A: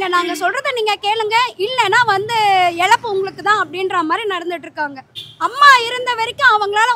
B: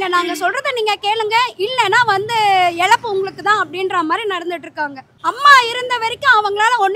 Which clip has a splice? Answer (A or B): B